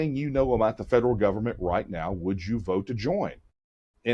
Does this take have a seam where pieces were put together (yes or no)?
no